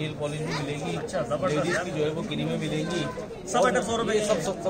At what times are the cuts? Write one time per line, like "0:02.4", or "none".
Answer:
none